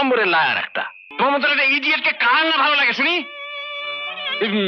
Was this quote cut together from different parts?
yes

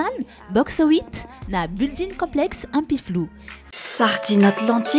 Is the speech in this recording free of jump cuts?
no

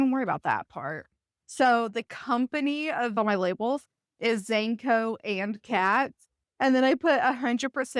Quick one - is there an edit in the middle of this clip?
yes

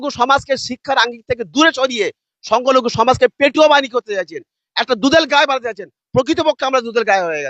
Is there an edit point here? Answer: no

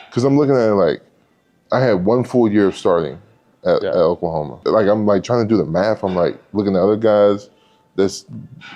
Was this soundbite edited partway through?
yes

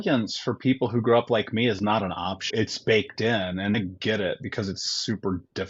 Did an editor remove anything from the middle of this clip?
yes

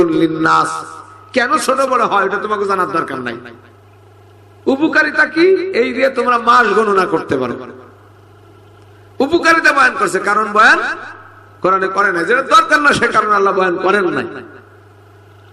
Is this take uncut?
yes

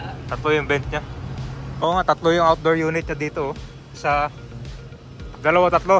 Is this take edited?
yes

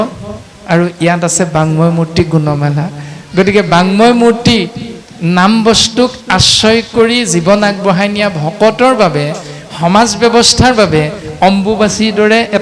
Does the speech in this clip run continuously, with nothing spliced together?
yes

